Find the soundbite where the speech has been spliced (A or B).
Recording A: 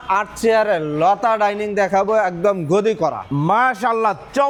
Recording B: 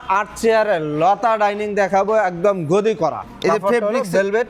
B